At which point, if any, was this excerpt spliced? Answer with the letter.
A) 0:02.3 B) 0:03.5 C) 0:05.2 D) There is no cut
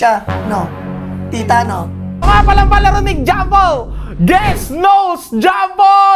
A